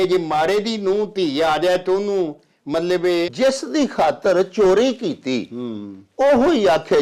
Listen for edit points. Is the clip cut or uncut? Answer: cut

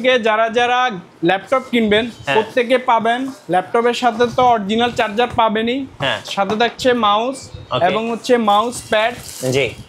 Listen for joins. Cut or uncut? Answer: uncut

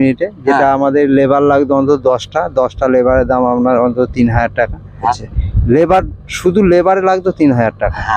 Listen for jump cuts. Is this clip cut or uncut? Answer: cut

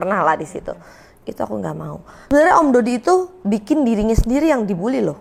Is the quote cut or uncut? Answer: cut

